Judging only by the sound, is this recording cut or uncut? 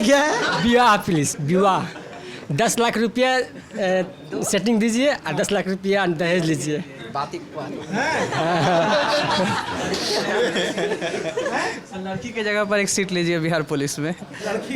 uncut